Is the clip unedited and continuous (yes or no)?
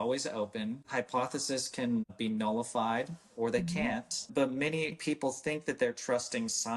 no